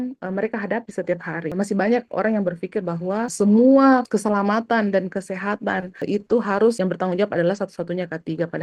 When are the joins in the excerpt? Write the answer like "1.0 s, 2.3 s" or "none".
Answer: 1.5 s, 3.3 s, 4.1 s, 6.0 s, 6.8 s